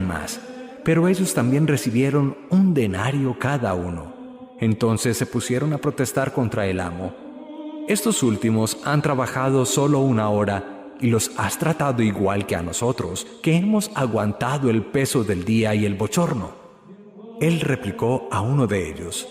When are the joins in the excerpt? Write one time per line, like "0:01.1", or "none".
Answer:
0:05.5